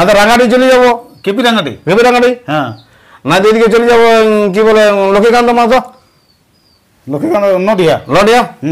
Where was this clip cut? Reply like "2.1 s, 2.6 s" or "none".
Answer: none